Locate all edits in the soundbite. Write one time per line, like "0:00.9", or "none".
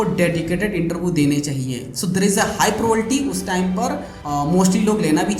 none